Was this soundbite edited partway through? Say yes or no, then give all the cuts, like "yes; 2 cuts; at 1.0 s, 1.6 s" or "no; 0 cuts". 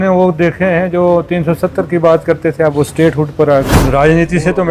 yes; 1 cut; at 3.8 s